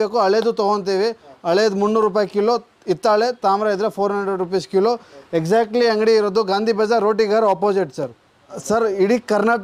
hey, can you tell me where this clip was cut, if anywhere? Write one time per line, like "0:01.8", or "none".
none